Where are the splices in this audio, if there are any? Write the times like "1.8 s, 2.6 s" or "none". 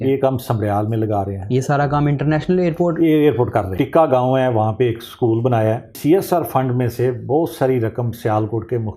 3.7 s, 5.9 s